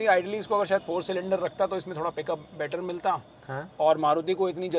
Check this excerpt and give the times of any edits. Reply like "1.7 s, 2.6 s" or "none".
none